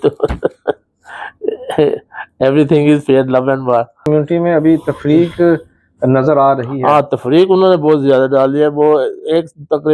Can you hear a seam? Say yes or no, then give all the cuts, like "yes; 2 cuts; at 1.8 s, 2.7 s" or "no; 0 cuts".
yes; 1 cut; at 4.0 s